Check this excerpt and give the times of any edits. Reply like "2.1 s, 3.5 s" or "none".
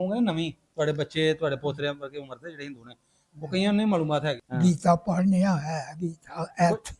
4.4 s